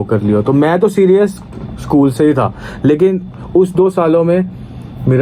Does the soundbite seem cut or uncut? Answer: uncut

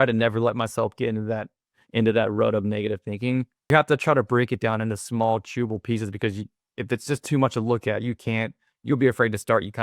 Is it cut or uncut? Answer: cut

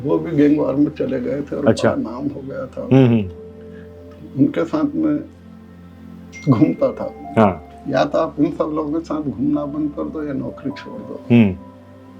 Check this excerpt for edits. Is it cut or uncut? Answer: cut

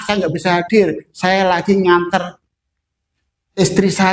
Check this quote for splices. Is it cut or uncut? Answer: uncut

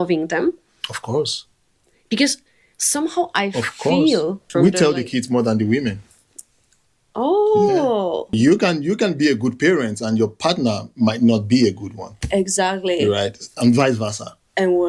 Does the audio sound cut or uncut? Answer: cut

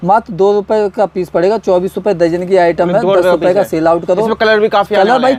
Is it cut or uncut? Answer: uncut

